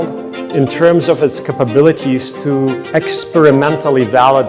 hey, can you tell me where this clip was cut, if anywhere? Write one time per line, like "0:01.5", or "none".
0:02.8